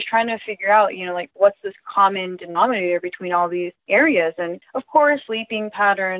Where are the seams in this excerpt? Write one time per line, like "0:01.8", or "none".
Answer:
0:03.8
0:04.7
0:05.3

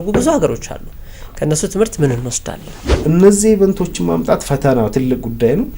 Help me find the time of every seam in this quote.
0:03.0

